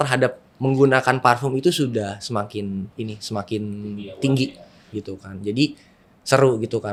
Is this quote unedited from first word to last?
yes; 0 cuts

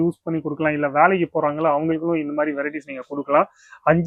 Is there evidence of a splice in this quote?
no; 0 cuts

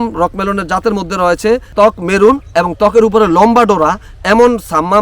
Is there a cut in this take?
yes; 1 cut; at 1.7 s

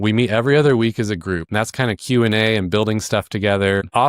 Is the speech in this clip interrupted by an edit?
yes; 1 cut; at 1.4 s

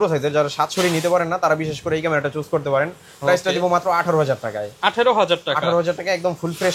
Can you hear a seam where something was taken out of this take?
no; 0 cuts

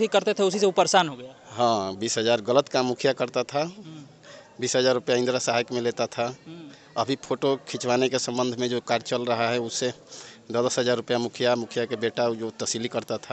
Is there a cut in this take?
no; 0 cuts

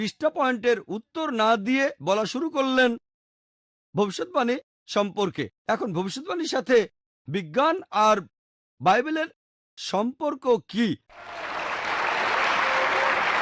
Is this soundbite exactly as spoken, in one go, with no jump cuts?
yes; 0 cuts

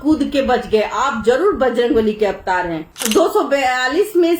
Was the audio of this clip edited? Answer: yes; 1 cut; at 2.9 s

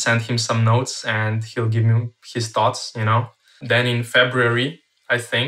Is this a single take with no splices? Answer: no; 1 cut; at 3.6 s

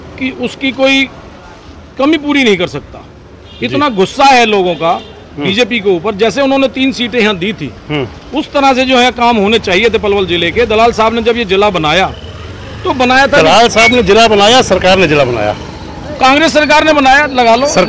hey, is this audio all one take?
yes; 0 cuts

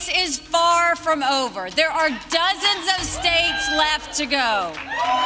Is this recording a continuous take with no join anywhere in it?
yes; 0 cuts

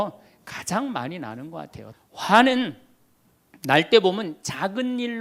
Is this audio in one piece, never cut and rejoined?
no; 1 cut; at 1.8 s

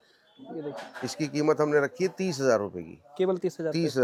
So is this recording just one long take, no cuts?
yes; 0 cuts

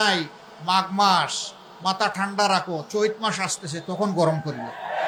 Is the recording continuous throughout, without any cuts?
yes; 0 cuts

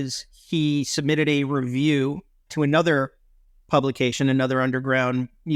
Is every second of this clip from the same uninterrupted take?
yes; 0 cuts

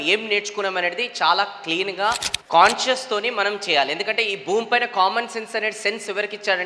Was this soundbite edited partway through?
yes; 1 cut; at 2.3 s

